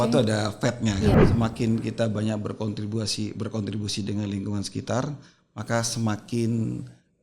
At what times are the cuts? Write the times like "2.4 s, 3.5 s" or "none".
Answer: 1.2 s

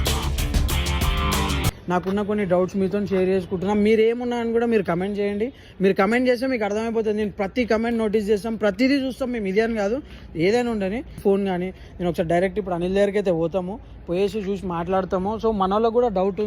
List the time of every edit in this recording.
1.7 s, 11.2 s

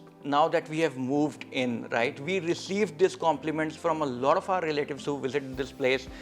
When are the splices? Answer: none

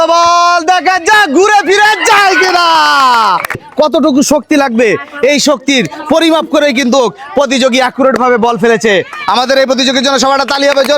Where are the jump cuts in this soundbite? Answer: 3.7 s

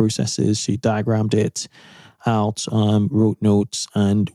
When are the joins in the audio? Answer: none

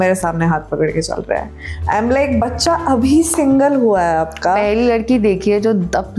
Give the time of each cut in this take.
none

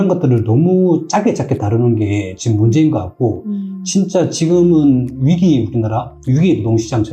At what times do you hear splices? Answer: none

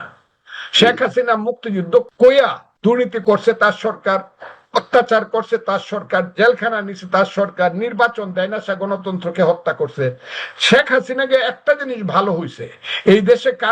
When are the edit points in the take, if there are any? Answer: 2.1 s, 3.2 s

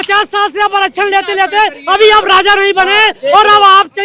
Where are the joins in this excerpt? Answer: none

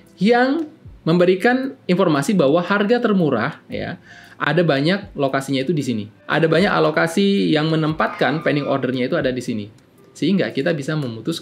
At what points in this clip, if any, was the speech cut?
6.1 s

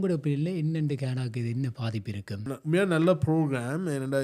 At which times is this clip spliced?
2.5 s

